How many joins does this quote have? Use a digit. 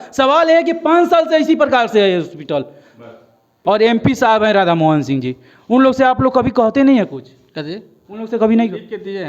1